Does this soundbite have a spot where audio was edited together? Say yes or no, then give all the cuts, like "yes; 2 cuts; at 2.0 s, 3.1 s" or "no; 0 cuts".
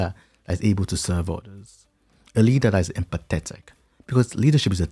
no; 0 cuts